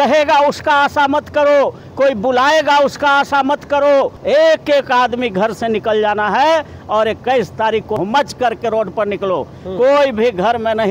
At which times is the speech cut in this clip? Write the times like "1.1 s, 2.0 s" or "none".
4.2 s, 8.0 s